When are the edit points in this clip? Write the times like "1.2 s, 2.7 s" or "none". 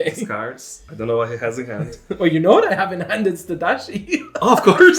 none